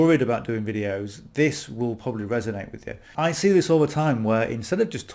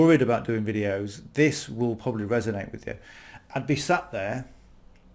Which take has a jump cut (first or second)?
first